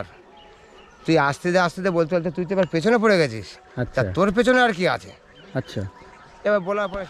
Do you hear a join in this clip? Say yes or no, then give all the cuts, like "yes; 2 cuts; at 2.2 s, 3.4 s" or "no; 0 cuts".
no; 0 cuts